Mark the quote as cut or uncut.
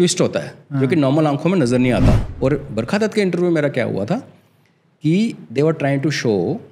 cut